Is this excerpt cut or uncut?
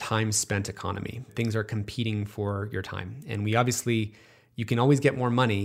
cut